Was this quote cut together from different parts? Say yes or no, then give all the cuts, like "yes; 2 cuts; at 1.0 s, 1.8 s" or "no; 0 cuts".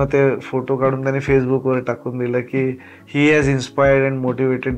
no; 0 cuts